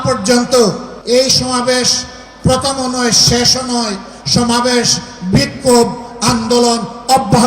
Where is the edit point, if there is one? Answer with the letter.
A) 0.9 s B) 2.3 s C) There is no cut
A